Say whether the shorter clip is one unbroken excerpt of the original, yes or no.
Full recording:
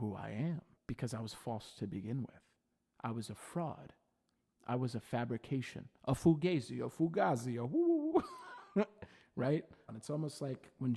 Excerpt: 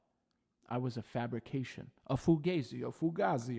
yes